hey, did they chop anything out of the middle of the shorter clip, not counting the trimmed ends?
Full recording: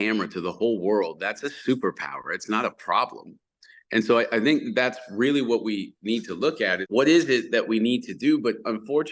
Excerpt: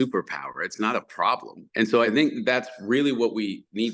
yes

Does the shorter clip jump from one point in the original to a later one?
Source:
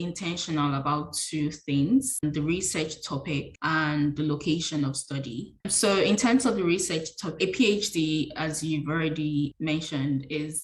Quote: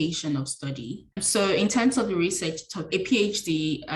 no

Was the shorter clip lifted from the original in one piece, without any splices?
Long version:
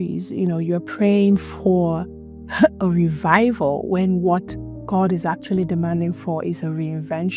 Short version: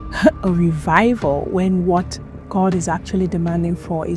yes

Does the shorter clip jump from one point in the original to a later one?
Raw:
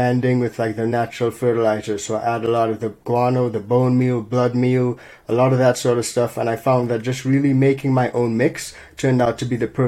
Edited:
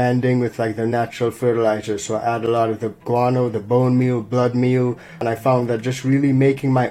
yes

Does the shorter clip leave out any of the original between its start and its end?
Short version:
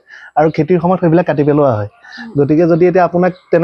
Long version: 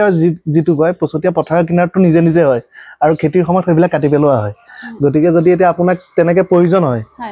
no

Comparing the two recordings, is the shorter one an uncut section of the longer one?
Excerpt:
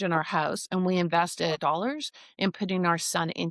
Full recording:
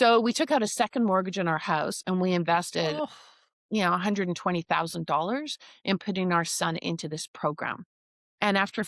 no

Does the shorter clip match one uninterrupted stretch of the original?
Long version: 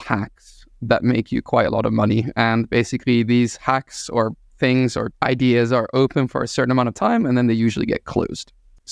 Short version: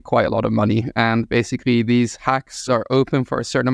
no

